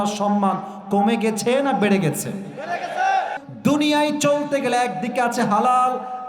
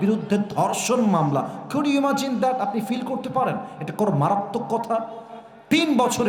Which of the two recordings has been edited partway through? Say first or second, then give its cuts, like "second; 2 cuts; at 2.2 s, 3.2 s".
first; 1 cut; at 3.4 s